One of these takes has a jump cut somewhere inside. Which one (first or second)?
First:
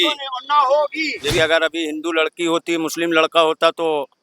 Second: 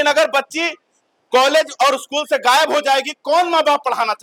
first